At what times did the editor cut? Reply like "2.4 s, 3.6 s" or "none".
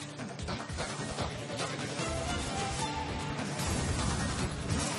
none